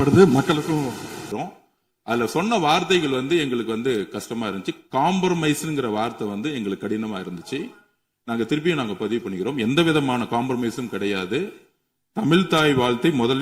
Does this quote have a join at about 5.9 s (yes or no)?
no